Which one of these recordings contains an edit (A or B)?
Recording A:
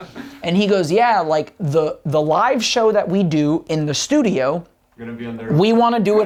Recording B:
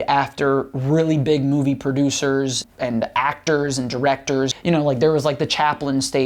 B